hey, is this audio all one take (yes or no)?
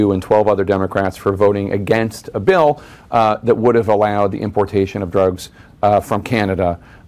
yes